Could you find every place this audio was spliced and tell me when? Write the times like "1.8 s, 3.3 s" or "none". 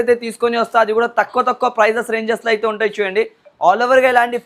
none